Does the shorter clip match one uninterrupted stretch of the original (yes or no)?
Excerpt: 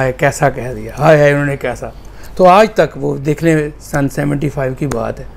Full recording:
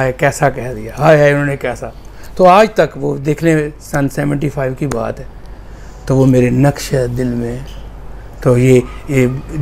yes